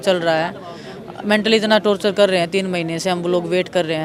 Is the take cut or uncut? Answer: uncut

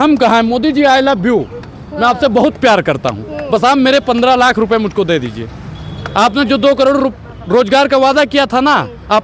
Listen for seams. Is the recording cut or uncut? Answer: uncut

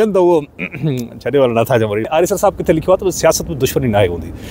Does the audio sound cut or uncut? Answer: cut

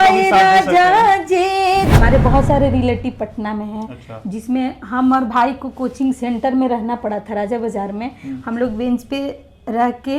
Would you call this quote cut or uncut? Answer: cut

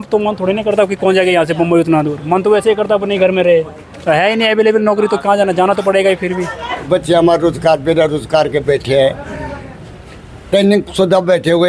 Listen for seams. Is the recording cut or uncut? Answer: cut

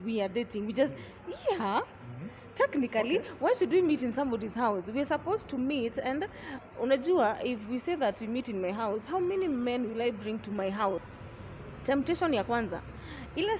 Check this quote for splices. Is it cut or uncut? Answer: cut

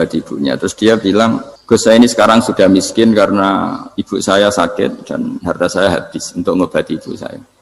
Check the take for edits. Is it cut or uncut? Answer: cut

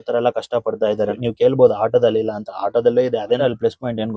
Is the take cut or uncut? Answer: cut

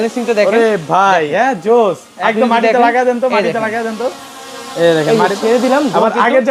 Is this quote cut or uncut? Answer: uncut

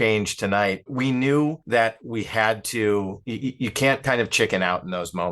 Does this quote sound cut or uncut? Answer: cut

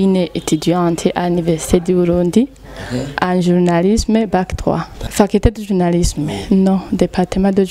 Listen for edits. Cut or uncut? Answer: cut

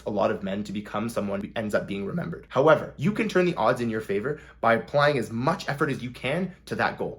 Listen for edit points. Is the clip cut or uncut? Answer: cut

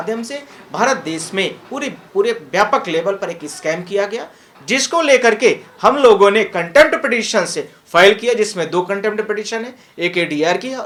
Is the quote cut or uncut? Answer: uncut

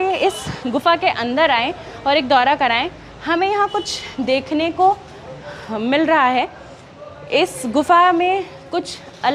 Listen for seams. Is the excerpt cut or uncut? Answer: uncut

